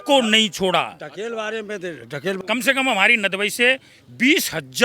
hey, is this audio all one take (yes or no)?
no